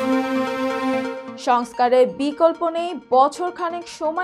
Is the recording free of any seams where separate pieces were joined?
no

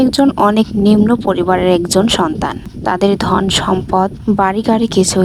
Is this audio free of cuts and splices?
yes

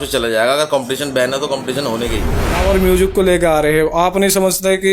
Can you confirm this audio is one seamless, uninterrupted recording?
no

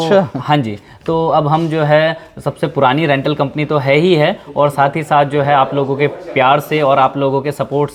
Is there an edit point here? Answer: no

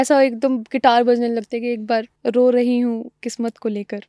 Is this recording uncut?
no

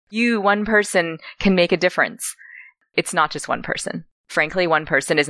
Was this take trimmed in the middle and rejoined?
no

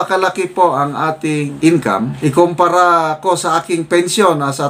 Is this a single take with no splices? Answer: yes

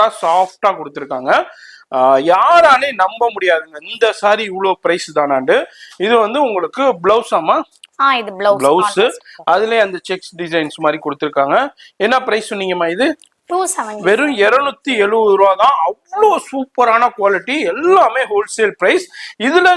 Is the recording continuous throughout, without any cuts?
yes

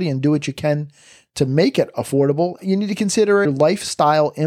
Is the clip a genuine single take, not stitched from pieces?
no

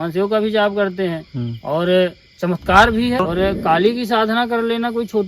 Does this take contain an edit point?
yes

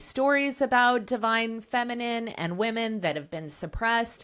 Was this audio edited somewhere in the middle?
no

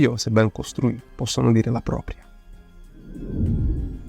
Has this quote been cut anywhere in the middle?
no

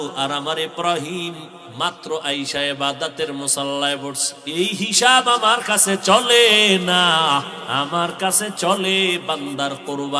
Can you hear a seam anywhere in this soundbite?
yes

